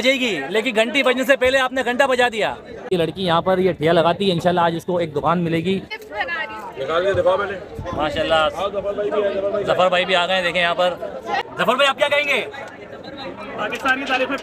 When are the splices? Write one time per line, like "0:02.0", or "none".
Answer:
0:02.9
0:06.0
0:11.5